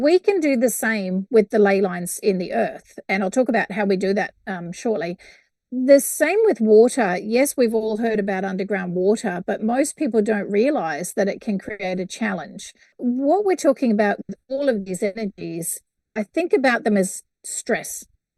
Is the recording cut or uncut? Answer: cut